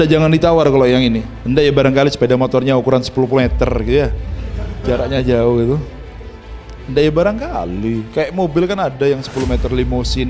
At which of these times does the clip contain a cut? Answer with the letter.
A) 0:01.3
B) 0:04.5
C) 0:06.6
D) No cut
A